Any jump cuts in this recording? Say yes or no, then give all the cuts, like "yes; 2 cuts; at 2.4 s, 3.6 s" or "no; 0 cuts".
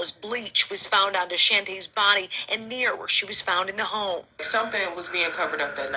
no; 0 cuts